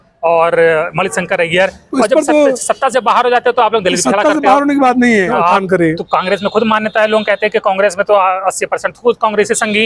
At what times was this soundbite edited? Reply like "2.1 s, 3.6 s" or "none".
5.3 s